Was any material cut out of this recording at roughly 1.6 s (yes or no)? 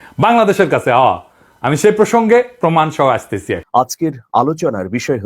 no